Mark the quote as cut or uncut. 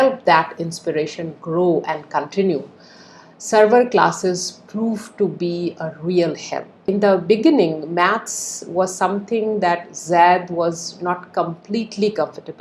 cut